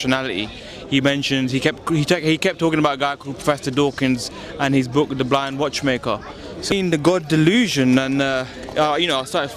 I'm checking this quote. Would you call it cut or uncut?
cut